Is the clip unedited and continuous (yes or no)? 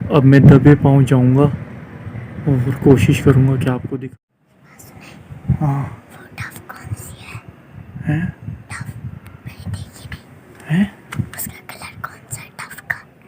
no